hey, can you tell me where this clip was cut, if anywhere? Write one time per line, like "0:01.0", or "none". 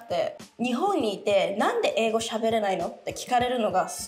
none